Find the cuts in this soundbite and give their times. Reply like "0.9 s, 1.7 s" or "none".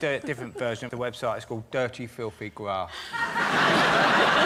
none